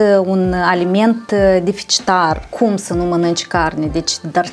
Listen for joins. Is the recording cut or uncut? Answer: cut